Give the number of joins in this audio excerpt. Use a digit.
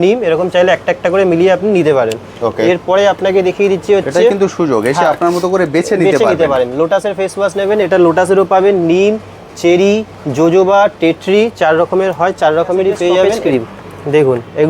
1